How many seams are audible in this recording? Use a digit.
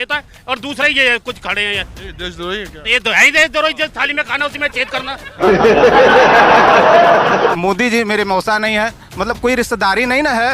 1